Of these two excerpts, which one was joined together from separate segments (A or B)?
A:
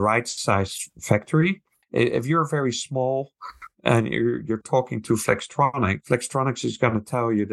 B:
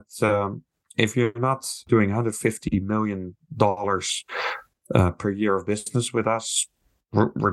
A